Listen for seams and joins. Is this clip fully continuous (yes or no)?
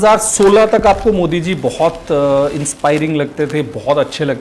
yes